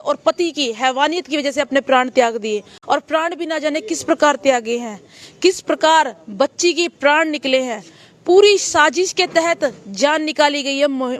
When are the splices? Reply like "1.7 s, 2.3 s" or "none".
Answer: none